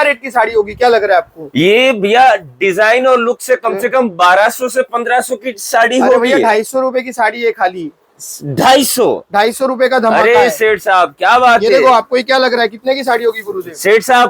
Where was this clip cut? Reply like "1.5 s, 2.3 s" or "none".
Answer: none

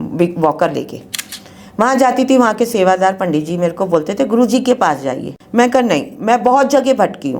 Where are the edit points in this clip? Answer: 5.3 s

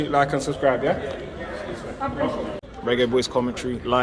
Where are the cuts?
2.6 s

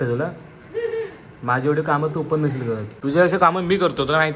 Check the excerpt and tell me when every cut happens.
2.9 s

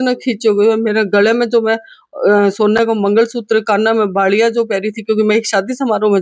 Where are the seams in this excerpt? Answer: none

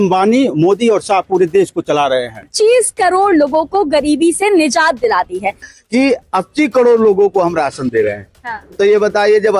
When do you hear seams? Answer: 2.5 s, 5.6 s

